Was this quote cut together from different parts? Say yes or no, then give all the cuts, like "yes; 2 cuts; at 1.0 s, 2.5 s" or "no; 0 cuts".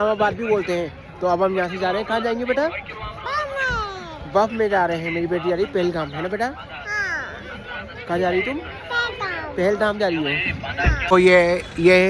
no; 0 cuts